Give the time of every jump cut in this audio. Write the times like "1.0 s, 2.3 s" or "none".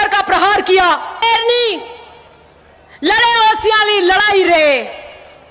1.2 s